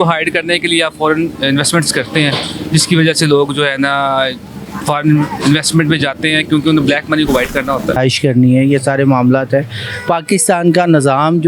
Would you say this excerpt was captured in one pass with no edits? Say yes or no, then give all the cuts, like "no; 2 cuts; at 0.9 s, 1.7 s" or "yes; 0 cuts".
no; 1 cut; at 8.0 s